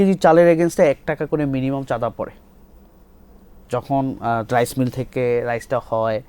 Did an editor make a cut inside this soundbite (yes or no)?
no